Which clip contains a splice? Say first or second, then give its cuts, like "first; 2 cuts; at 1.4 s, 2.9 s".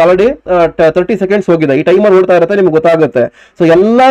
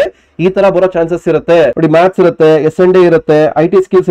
second; 1 cut; at 1.7 s